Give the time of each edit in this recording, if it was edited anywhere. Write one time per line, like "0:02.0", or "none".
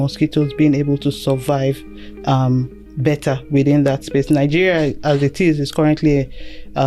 none

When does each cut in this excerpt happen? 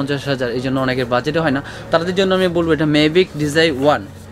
none

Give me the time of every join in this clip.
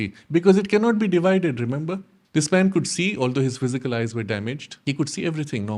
0:02.1
0:04.7

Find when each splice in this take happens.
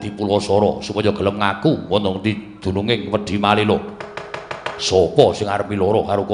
none

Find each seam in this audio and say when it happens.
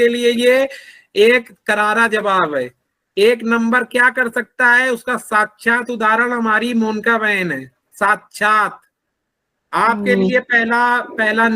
none

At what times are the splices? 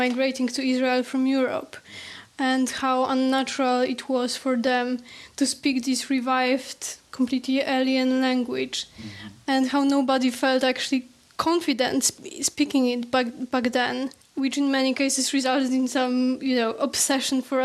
none

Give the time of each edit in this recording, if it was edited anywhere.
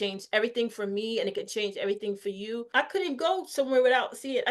0:02.7

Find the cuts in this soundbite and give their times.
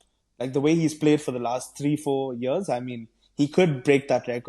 none

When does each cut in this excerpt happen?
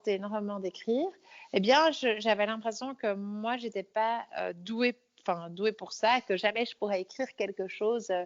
none

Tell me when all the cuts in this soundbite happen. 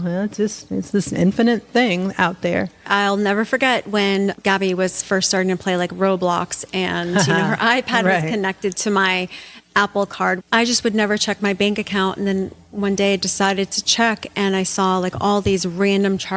0:02.9
0:04.4
0:10.4

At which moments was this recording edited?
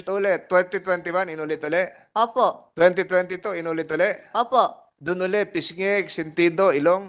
none

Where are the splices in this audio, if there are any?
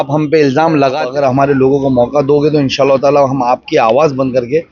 0:01.0

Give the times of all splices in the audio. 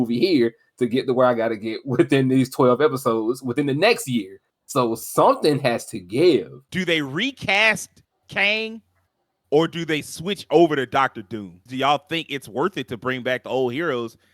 0:06.6
0:11.7

